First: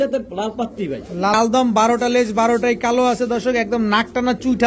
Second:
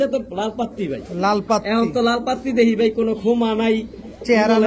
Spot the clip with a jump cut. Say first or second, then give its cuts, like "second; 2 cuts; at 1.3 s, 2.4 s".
first; 1 cut; at 1.3 s